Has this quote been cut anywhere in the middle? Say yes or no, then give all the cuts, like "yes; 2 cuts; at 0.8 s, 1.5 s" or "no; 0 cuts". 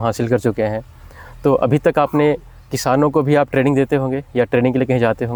no; 0 cuts